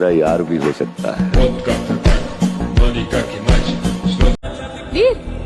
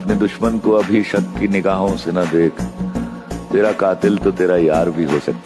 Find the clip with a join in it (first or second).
first